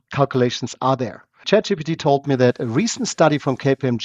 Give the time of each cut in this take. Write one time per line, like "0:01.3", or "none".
0:01.4